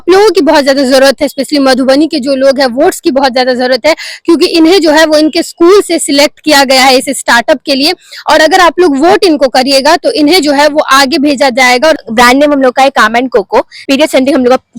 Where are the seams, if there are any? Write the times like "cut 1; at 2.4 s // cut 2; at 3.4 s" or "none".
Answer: cut 1; at 12.0 s // cut 2; at 13.8 s